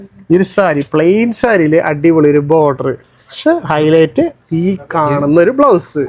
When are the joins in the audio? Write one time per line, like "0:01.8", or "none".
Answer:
none